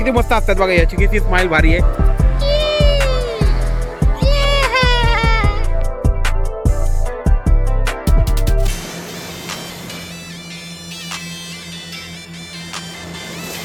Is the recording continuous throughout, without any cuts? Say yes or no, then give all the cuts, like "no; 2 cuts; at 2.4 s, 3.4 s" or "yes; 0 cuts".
yes; 0 cuts